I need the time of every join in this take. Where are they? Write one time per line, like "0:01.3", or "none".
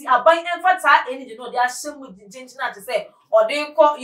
none